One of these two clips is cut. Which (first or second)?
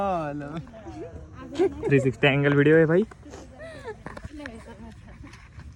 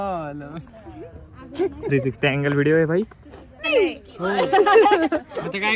second